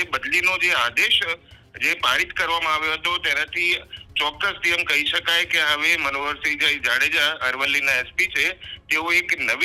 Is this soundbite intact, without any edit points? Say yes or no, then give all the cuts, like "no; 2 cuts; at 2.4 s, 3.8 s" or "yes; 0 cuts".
yes; 0 cuts